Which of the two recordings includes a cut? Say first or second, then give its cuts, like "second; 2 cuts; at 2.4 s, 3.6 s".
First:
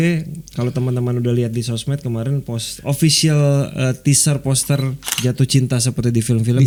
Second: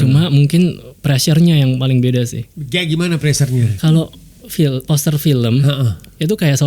second; 1 cut; at 3.7 s